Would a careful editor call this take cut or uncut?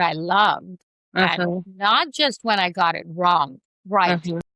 uncut